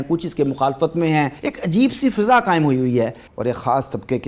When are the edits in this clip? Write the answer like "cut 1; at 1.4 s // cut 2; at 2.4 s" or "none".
cut 1; at 1.4 s // cut 2; at 3.2 s